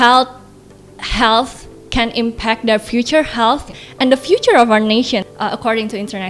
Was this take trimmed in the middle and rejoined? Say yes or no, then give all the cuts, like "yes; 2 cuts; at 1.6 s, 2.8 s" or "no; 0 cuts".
yes; 1 cut; at 5.3 s